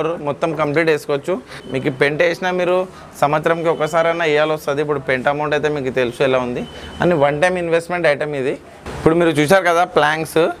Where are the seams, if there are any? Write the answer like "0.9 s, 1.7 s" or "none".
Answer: 1.6 s, 8.9 s